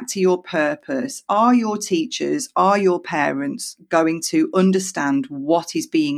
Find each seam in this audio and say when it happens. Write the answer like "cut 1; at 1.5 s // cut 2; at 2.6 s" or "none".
none